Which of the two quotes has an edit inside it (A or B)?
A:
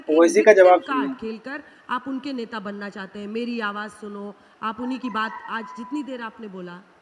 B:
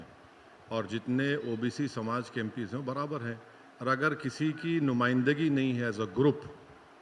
A